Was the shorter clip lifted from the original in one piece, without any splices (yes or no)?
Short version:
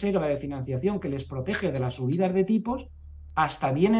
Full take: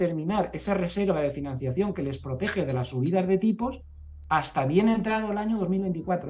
yes